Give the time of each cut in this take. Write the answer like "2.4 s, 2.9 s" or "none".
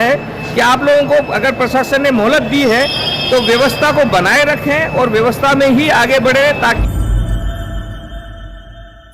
6.8 s

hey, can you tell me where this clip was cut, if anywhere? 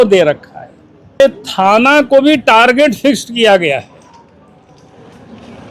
1.2 s

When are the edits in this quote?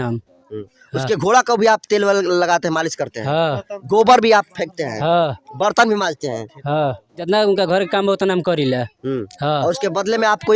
7.2 s

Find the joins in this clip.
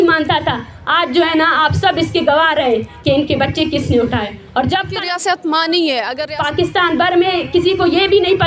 4.9 s, 6.2 s

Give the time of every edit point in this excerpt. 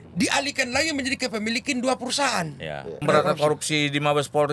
3.0 s

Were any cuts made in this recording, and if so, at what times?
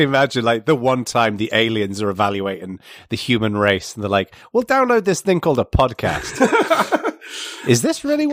none

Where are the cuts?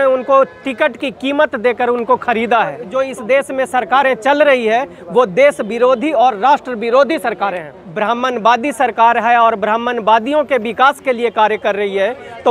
2.8 s, 7.8 s

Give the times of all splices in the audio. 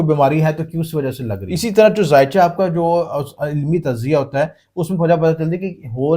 1.3 s

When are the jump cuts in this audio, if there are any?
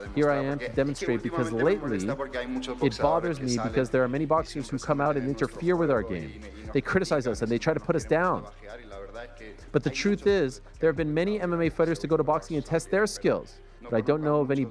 none

